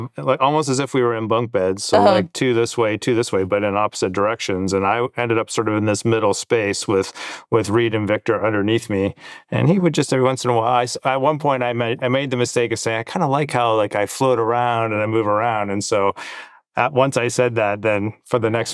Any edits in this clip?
no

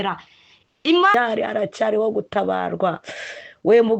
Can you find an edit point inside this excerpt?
yes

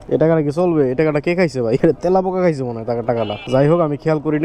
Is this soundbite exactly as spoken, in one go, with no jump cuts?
yes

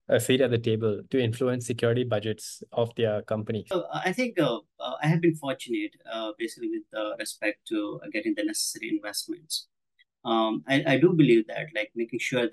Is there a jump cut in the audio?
yes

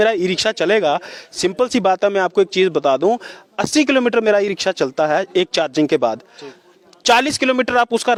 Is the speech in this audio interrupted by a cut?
no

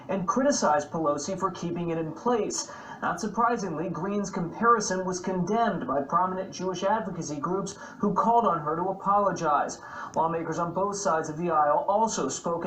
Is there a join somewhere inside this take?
yes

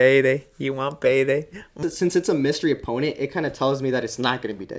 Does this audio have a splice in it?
yes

